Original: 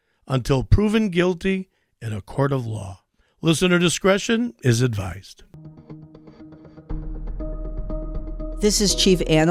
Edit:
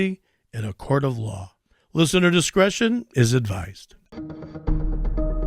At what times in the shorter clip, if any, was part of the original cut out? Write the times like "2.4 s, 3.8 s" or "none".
4.1 s